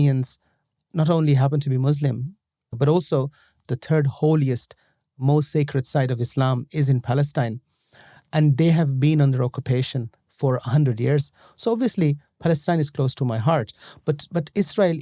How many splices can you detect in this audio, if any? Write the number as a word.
two